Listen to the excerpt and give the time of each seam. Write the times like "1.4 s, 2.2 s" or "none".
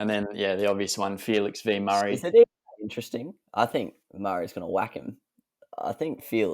2.2 s